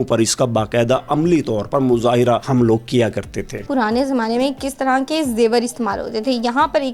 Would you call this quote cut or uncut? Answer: cut